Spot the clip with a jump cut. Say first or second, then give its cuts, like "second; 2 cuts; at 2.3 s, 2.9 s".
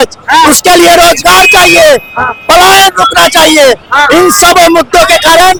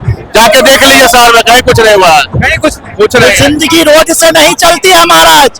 second; 1 cut; at 3.3 s